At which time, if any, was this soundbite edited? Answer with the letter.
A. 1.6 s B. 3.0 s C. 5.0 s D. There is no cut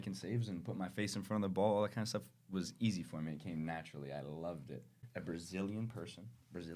C